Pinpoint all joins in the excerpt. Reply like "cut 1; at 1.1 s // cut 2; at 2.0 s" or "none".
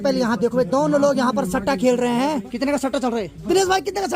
cut 1; at 2.5 s // cut 2; at 3.4 s

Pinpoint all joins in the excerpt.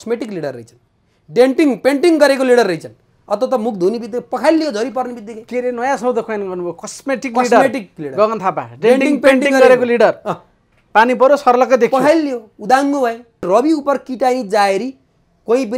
cut 1; at 13.5 s

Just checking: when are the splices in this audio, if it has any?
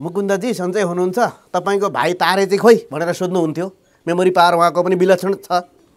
none

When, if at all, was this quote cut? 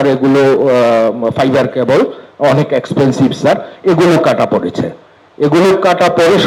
none

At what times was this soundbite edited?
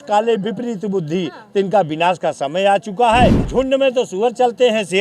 cut 1; at 3.4 s

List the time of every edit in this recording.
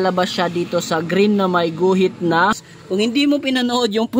cut 1; at 2.7 s

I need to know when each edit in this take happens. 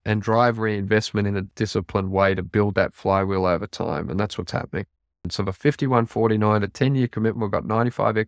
cut 1; at 1.5 s // cut 2; at 5.3 s

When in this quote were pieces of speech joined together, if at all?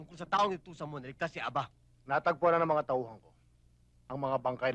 cut 1; at 1.9 s

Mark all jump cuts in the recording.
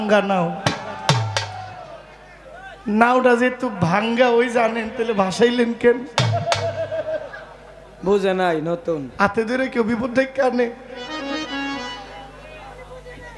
none

